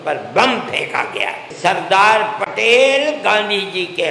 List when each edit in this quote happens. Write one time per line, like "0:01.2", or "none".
0:01.5